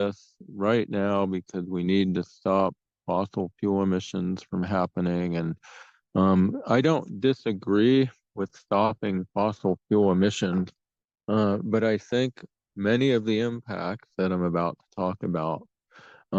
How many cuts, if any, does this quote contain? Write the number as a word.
zero